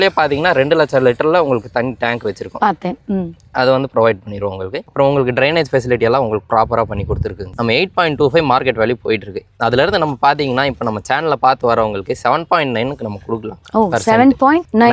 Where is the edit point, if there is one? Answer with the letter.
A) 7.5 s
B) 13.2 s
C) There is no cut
A